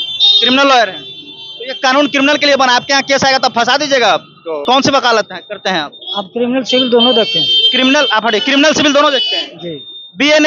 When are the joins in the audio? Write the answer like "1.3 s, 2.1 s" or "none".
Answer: 4.6 s